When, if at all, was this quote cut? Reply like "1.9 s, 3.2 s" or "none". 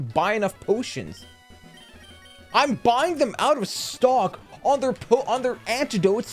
none

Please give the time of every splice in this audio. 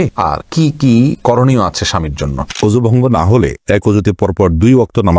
2.4 s

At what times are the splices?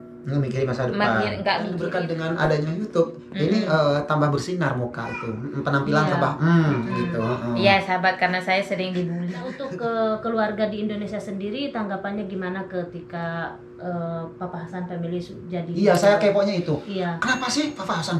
1.9 s, 9.6 s

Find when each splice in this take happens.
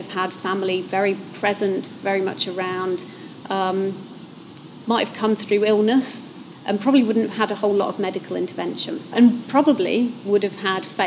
9.1 s

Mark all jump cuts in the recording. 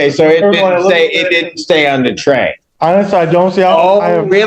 2.6 s

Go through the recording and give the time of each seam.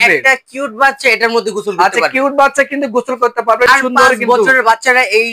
3.7 s

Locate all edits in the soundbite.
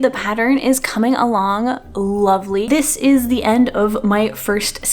2.7 s

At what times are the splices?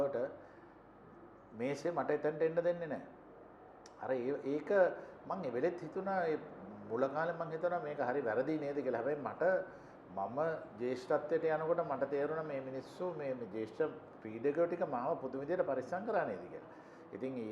none

